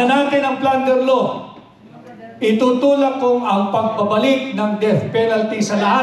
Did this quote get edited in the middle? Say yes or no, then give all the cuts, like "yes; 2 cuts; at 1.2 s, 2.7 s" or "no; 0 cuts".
no; 0 cuts